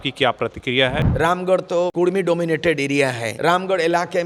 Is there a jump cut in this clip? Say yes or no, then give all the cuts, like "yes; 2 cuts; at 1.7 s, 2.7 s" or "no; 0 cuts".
yes; 3 cuts; at 1.0 s, 1.9 s, 3.3 s